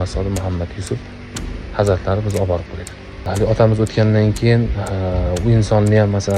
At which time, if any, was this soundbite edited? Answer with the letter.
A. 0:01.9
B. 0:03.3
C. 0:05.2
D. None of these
B